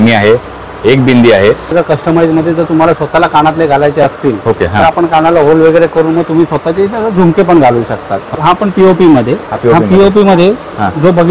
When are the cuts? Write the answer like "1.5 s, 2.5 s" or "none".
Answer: 1.7 s, 8.3 s